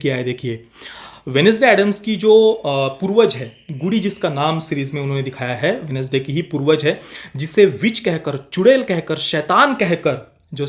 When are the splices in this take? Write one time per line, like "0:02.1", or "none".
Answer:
none